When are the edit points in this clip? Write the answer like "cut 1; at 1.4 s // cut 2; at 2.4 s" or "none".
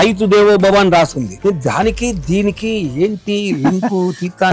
cut 1; at 1.4 s